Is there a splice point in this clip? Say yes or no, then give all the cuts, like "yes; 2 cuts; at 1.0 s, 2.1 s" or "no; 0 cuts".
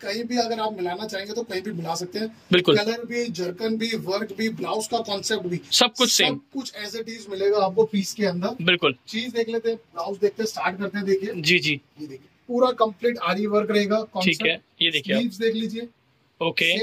no; 0 cuts